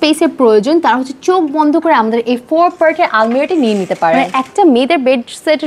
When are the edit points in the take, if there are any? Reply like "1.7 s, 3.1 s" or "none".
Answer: 4.4 s